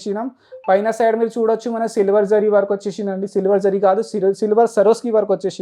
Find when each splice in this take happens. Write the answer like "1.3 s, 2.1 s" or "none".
none